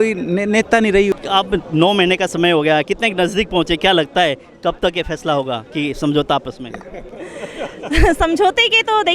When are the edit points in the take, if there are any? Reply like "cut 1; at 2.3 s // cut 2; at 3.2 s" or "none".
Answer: cut 1; at 1.1 s

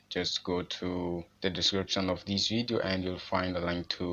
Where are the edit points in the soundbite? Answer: cut 1; at 1.3 s

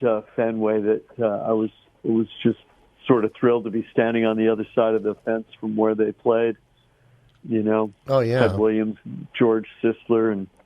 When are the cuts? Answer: none

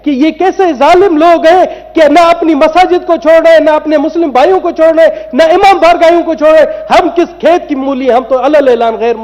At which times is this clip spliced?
none

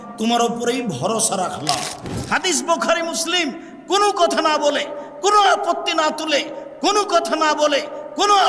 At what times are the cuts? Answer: cut 1; at 2.1 s

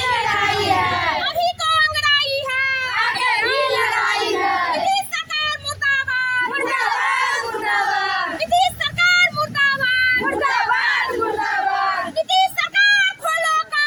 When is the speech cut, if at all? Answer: none

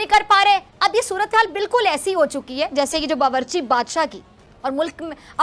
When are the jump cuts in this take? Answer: none

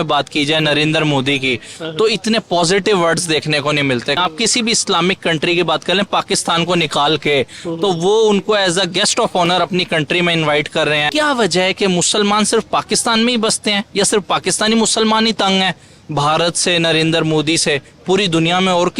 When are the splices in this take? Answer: cut 1; at 4.2 s // cut 2; at 11.1 s

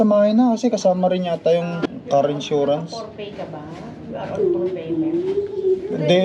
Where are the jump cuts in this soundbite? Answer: cut 1; at 1.9 s

